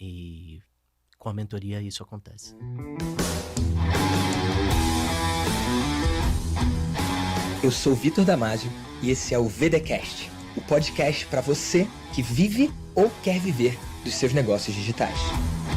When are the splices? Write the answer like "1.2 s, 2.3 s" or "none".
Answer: 2.6 s